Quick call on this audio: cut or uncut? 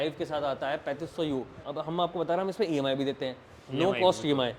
cut